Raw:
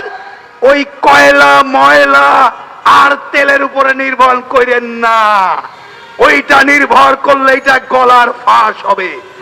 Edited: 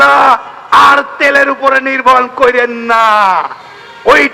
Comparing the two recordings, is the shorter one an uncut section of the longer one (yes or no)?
yes